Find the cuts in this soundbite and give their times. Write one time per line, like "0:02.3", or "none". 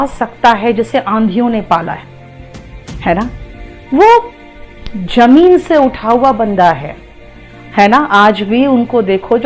none